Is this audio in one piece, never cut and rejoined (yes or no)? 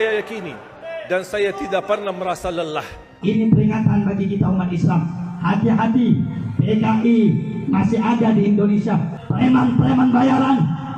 no